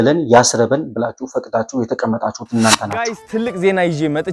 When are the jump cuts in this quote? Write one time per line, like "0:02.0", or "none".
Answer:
0:03.2